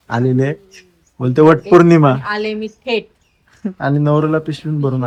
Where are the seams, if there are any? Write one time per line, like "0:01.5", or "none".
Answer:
none